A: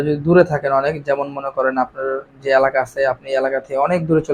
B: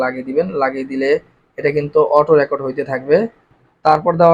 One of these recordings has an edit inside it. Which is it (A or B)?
B